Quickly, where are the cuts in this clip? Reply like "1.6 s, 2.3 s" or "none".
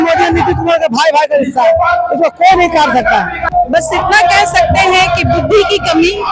3.4 s